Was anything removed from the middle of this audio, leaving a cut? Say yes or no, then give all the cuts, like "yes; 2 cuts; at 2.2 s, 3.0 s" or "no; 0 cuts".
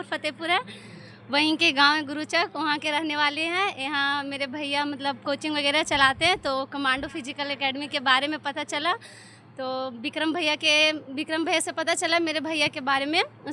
no; 0 cuts